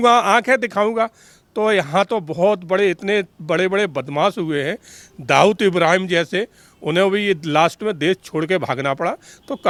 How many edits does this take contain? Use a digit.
0